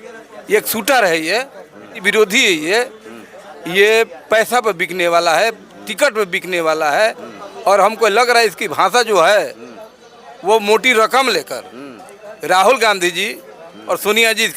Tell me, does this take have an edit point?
yes; 1 cut; at 2.0 s

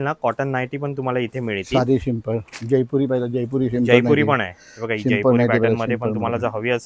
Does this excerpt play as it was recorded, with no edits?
yes; 0 cuts

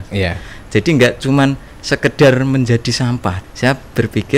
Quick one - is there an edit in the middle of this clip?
yes; 1 cut; at 3.5 s

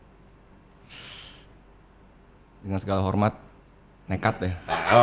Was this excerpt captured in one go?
yes; 0 cuts

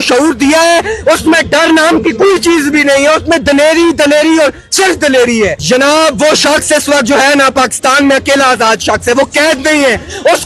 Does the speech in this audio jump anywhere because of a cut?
yes; 1 cut; at 5.6 s

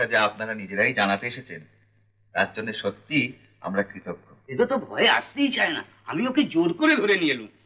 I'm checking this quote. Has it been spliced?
no; 0 cuts

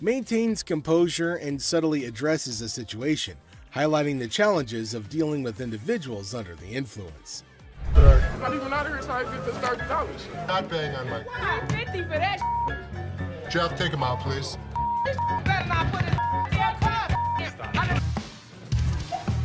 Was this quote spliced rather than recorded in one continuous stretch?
yes; 1 cut; at 18.0 s

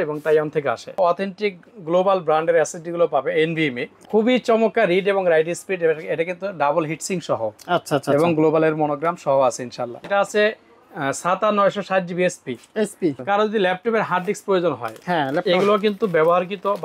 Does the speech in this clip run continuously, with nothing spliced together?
no; 4 cuts; at 0.9 s, 3.9 s, 10.0 s, 13.2 s

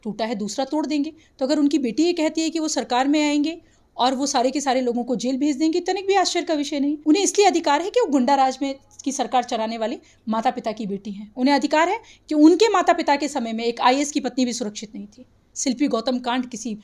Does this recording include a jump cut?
yes; 2 cuts; at 7.0 s, 15.5 s

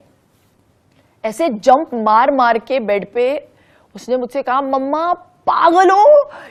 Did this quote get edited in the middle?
no; 0 cuts

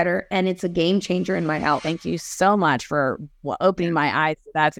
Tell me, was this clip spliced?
yes; 1 cut; at 1.8 s

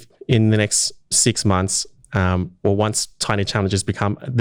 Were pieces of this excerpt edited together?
no; 0 cuts

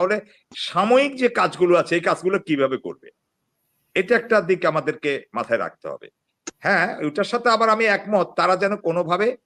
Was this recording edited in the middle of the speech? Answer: no; 0 cuts

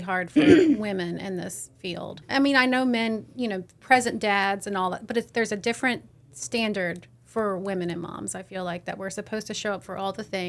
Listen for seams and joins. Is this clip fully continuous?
no; 1 cut; at 2.2 s

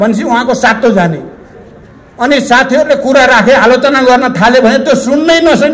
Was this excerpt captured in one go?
yes; 0 cuts

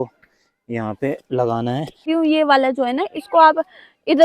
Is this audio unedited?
no; 1 cut; at 2.1 s

